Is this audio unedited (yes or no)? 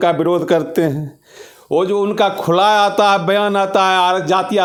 yes